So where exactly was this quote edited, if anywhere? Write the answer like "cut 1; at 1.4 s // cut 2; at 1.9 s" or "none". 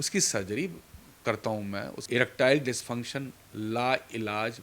cut 1; at 2.0 s